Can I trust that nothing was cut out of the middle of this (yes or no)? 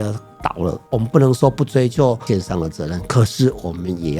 no